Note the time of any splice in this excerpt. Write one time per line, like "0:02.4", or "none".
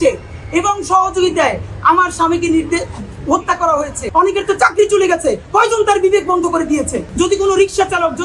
0:04.0
0:07.0